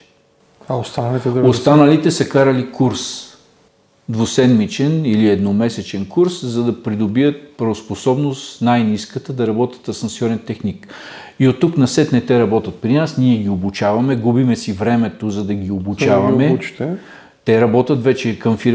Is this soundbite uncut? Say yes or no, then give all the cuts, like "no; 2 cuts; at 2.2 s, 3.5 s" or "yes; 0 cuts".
yes; 0 cuts